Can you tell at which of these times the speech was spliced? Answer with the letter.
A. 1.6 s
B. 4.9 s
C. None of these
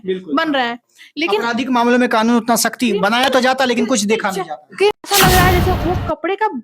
B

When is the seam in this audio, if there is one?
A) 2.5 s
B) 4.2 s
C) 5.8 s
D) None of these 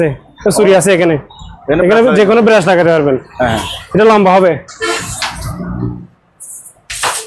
D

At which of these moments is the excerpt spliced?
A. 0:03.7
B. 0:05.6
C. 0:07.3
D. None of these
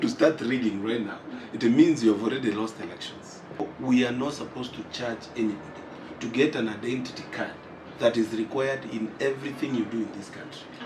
A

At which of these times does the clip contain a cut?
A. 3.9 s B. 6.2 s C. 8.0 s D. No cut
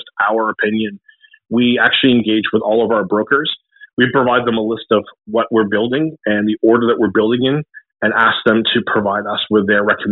D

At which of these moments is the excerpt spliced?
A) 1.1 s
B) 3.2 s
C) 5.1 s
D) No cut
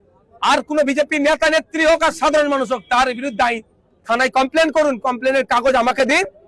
D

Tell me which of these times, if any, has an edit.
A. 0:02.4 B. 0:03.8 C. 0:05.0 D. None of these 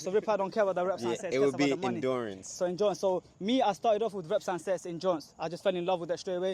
D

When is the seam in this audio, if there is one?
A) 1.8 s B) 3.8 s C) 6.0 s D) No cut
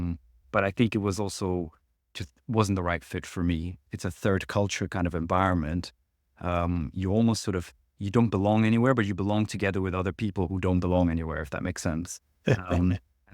B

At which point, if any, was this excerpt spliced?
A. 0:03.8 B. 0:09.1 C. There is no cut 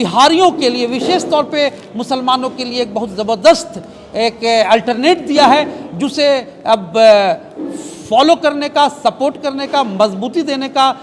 C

